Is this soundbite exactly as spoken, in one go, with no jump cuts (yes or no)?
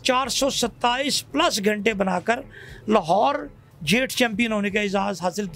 yes